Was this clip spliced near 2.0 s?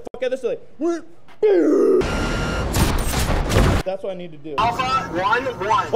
yes; 2 cuts; at 2.0 s, 4.6 s

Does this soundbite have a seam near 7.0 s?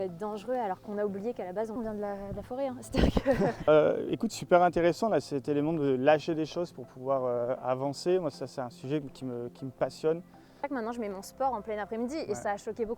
no; 3 cuts; at 1.8 s, 3.6 s, 10.6 s

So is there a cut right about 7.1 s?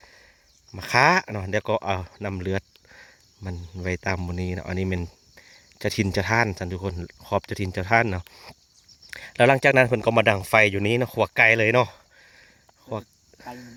no; 0 cuts

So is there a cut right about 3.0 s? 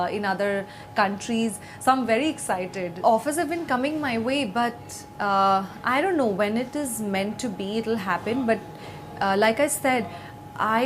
yes; 1 cut; at 3.0 s

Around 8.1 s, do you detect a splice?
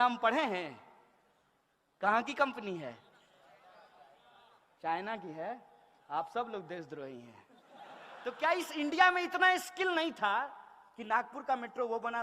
yes; 1 cut; at 8.1 s

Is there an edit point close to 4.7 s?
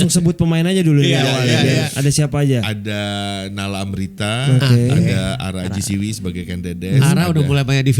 no; 1 cut; at 1.9 s

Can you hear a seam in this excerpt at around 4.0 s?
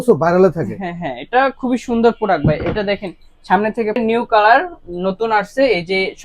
yes; 1 cut; at 4.0 s

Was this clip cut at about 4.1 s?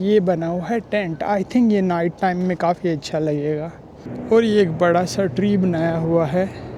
yes; 1 cut; at 4.1 s

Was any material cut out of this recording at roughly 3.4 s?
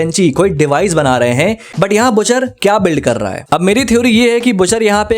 yes; 2 cuts; at 1.7 s, 3.4 s

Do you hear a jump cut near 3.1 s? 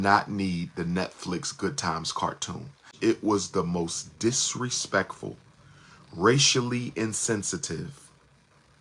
yes; 1 cut; at 3.1 s

